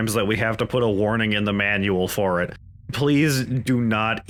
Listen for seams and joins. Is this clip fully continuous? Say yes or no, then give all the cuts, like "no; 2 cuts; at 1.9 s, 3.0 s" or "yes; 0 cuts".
yes; 0 cuts